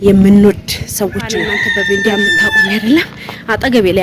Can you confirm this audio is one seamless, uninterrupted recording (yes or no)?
no